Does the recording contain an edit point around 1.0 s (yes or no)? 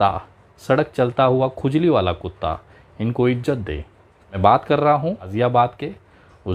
no